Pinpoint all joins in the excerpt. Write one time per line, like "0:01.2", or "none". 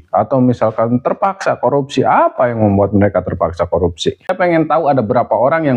0:04.2